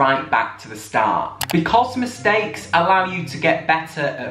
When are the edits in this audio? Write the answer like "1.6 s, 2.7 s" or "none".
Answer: 1.5 s